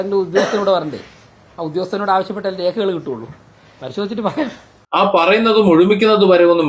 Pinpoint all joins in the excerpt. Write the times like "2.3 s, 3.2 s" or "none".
4.8 s